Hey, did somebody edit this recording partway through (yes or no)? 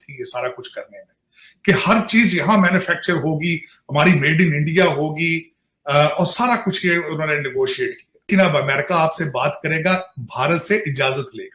yes